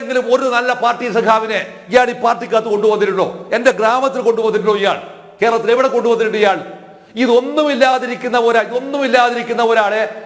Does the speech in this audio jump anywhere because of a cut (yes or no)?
no